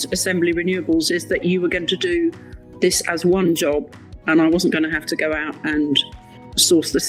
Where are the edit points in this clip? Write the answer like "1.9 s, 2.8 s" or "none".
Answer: none